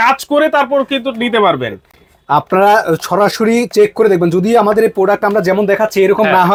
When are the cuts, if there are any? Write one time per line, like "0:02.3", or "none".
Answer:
none